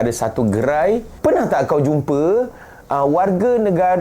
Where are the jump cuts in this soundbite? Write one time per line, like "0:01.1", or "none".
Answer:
0:01.1